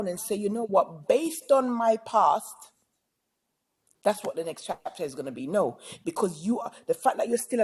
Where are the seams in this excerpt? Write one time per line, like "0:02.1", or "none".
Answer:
none